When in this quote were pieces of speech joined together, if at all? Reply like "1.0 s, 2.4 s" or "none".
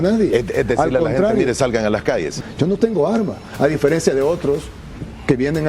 2.3 s